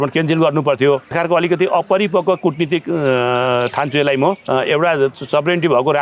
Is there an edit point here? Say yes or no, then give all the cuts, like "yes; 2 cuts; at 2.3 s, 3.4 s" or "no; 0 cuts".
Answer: yes; 2 cuts; at 1.1 s, 4.4 s